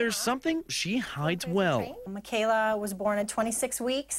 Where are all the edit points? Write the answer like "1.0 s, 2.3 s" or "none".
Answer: none